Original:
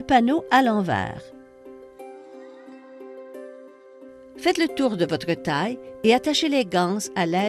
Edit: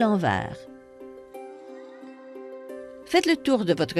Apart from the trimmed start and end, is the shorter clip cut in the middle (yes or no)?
yes